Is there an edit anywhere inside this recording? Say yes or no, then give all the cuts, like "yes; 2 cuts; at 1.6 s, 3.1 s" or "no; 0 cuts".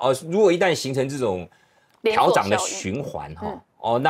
no; 0 cuts